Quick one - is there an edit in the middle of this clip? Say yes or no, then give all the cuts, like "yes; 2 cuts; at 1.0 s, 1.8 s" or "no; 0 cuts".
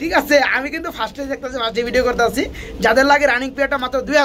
no; 0 cuts